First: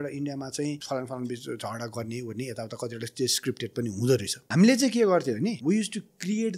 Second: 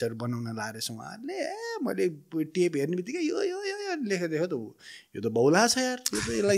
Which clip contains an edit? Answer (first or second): first